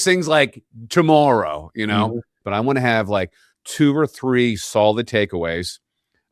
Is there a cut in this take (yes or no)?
yes